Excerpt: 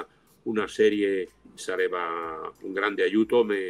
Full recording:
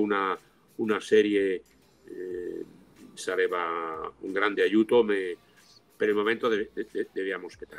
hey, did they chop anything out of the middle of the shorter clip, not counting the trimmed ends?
yes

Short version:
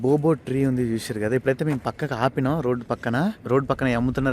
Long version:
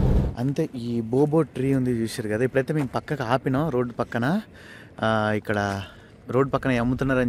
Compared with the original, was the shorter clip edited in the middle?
yes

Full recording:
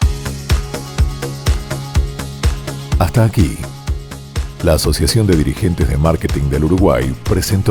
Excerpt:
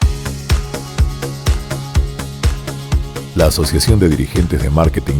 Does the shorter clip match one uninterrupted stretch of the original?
no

